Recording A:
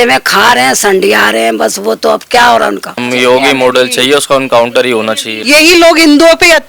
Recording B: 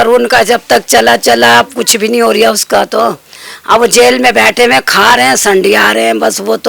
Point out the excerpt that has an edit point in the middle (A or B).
A